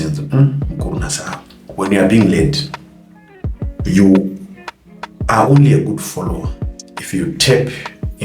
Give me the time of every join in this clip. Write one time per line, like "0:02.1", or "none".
0:01.6